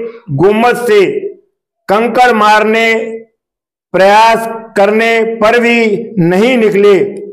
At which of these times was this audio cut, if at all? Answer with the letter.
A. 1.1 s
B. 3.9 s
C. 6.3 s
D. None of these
D